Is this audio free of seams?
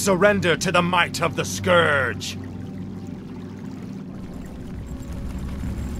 no; 1 cut; at 1.3 s

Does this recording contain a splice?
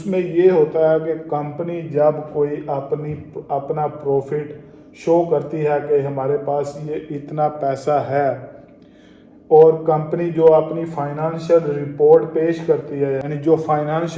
no; 0 cuts

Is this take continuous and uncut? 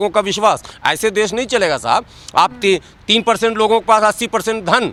yes; 0 cuts

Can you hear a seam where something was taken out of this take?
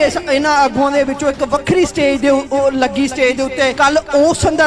yes; 1 cut; at 3.7 s

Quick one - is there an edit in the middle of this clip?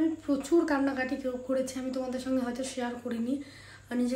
no; 0 cuts

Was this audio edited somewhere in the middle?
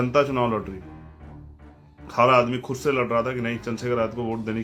no; 0 cuts

